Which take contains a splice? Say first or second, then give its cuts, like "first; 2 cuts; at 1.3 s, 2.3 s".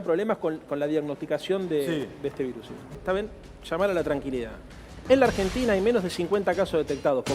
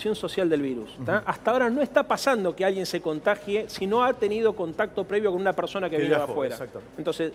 first; 1 cut; at 2.9 s